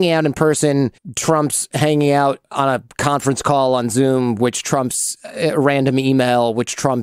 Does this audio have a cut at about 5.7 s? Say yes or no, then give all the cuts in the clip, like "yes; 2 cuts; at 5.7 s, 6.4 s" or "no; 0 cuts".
no; 2 cuts; at 1.1 s, 2.5 s